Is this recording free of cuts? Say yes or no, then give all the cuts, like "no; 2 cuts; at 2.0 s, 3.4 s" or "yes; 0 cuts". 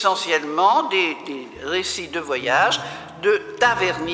yes; 0 cuts